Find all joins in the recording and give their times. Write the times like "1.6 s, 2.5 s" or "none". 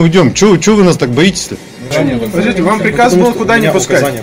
1.9 s